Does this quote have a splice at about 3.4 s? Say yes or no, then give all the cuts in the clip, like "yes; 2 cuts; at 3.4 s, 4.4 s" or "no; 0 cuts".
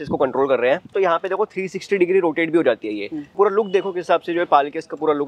yes; 2 cuts; at 0.9 s, 3.4 s